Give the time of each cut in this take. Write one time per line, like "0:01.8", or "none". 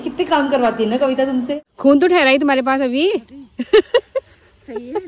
0:01.6